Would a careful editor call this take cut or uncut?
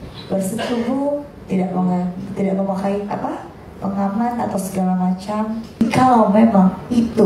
cut